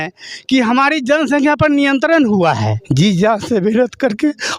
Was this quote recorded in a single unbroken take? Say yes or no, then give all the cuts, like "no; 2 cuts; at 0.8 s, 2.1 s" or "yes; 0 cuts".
no; 1 cut; at 2.8 s